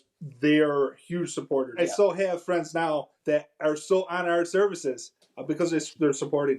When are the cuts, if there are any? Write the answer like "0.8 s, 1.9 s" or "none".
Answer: 1.7 s, 3.1 s

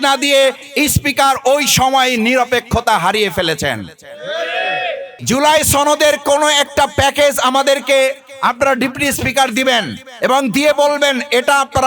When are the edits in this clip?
5.1 s

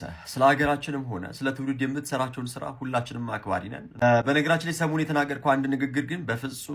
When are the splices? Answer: 4.0 s

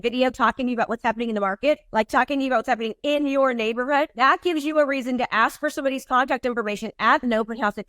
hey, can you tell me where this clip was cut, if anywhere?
1.8 s, 4.1 s

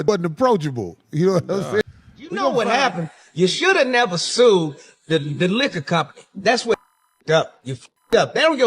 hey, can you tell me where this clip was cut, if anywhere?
2.5 s

